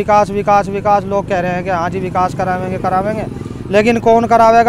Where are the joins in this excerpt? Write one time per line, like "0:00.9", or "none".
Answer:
none